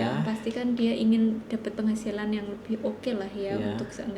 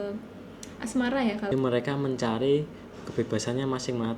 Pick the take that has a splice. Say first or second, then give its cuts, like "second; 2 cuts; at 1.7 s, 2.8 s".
second; 1 cut; at 1.4 s